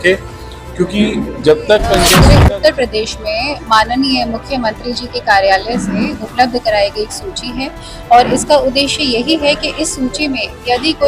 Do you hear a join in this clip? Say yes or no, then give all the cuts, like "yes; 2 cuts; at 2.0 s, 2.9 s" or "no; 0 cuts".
yes; 1 cut; at 2.1 s